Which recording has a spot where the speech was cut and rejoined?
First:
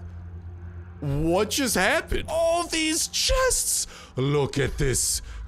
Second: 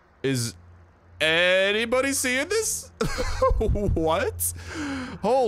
first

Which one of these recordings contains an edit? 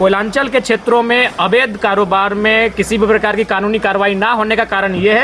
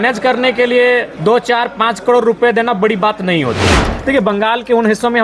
second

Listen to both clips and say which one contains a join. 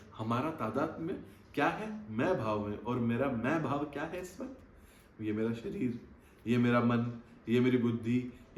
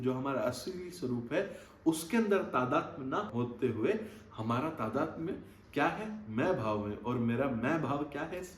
second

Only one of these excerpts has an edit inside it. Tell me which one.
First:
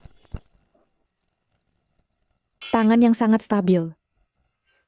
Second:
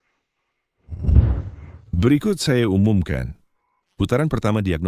first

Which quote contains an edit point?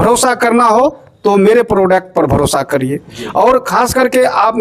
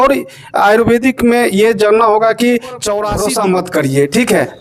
second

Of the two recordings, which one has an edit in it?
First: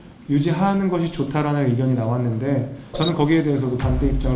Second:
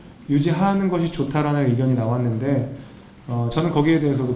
first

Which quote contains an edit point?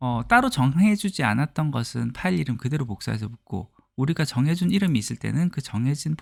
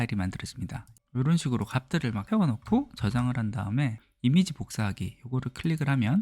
second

